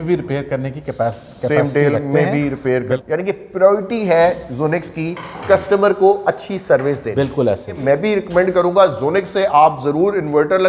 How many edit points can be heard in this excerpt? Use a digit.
2